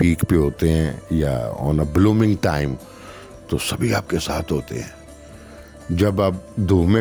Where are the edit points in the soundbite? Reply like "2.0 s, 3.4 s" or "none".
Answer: none